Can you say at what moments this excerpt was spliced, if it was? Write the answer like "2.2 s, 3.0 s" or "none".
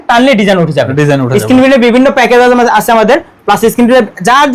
none